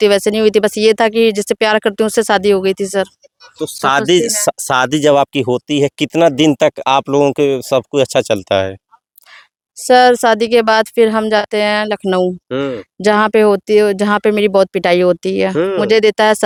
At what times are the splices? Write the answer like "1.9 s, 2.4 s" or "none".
none